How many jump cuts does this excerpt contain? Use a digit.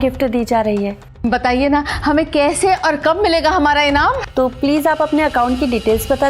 2